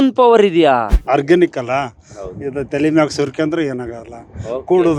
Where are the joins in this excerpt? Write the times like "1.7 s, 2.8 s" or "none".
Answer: 1.0 s

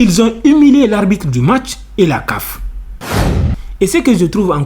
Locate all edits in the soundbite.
3.2 s

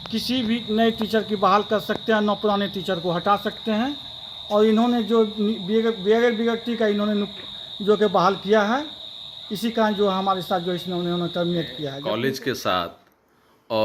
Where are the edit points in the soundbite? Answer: 11.9 s

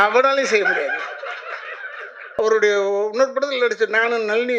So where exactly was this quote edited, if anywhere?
2.3 s

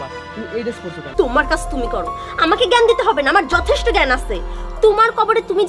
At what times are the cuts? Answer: 1.0 s

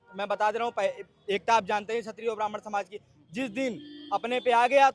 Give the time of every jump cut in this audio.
none

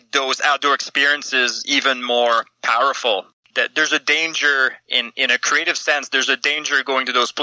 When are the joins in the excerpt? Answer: 3.4 s

